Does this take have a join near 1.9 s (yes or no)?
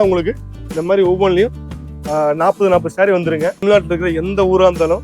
no